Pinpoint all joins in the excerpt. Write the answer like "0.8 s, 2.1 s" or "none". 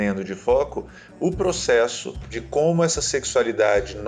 2.3 s